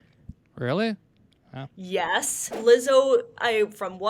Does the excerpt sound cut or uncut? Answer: cut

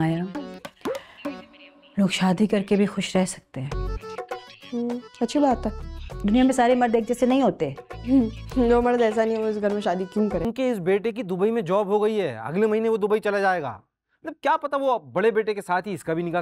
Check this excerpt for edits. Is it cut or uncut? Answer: cut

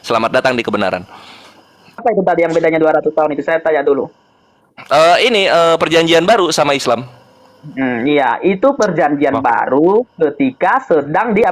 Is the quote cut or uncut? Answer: cut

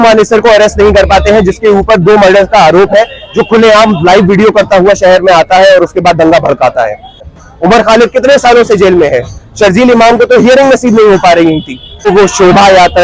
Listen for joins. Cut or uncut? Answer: cut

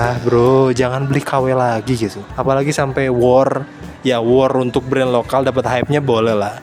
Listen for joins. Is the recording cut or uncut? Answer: uncut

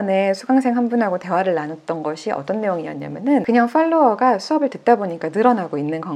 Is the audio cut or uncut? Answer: uncut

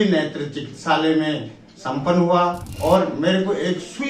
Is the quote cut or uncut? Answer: cut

